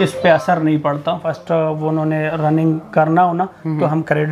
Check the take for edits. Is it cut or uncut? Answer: cut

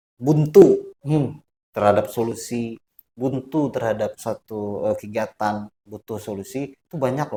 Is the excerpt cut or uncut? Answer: uncut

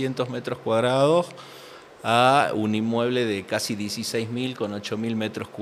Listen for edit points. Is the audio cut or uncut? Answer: uncut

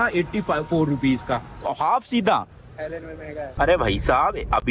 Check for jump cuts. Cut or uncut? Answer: cut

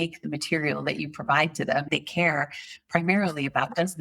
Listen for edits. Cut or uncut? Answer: cut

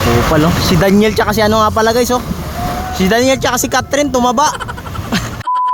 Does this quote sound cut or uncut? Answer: uncut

